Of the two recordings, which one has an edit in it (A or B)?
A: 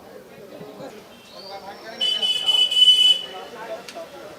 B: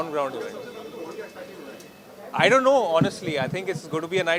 A